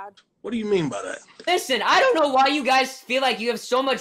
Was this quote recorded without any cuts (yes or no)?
no